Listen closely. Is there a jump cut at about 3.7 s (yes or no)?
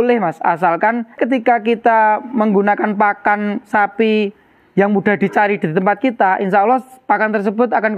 no